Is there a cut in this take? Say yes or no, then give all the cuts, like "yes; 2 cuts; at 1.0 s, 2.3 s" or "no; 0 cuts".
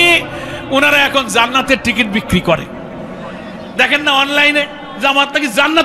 yes; 1 cut; at 4.8 s